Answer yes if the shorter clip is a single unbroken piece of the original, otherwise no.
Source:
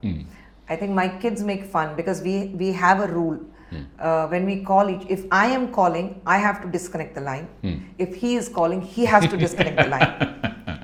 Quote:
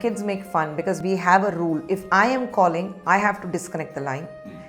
no